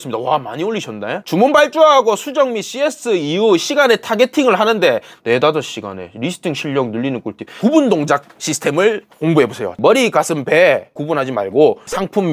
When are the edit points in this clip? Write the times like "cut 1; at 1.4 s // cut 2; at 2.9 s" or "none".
cut 1; at 7.4 s // cut 2; at 9.7 s